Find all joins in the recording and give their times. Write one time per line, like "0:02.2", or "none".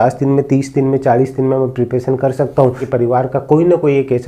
0:02.8